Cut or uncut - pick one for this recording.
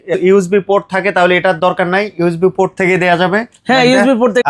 uncut